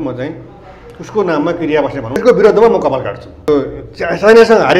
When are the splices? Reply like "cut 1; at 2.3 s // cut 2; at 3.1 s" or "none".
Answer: cut 1; at 2.2 s // cut 2; at 3.5 s